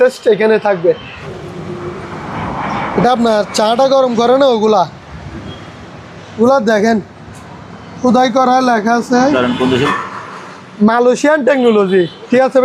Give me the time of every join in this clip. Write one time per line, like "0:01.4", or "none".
0:01.2
0:09.9